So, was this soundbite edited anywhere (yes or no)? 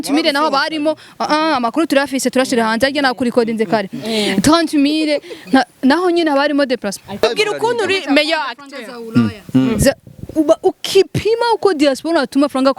yes